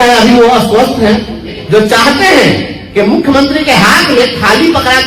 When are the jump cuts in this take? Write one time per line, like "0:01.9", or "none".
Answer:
0:01.5